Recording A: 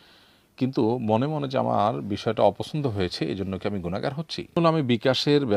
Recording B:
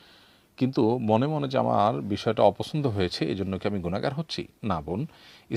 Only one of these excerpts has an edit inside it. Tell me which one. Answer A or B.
A